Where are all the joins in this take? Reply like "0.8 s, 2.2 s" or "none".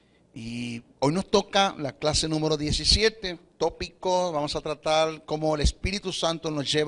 none